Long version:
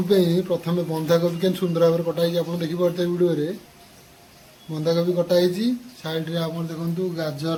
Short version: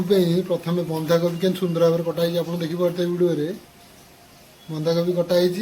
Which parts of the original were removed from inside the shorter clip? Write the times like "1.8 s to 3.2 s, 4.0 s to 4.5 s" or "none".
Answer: none